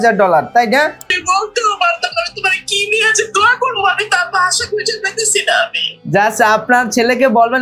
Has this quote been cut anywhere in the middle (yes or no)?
yes